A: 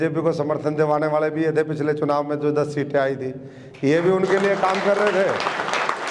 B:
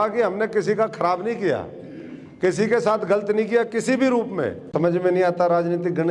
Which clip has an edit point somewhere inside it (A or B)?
B